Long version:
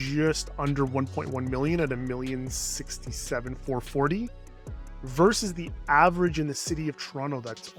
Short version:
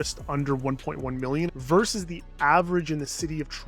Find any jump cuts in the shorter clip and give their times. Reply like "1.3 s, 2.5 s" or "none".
1.5 s